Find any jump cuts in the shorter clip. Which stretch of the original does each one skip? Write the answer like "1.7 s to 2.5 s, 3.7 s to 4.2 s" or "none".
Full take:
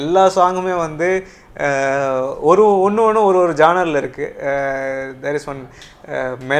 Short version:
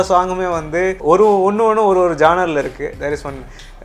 1.2 s to 2.4 s, 4.3 s to 5.2 s